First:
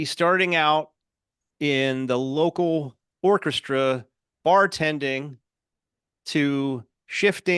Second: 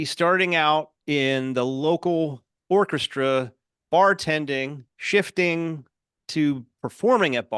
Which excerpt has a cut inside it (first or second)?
second